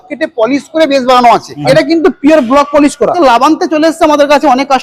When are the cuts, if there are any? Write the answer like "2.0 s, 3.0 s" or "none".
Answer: 1.5 s, 3.2 s